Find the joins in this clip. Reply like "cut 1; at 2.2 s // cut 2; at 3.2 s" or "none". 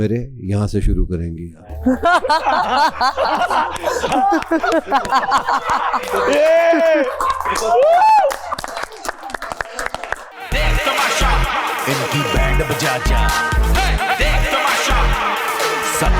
cut 1; at 10.3 s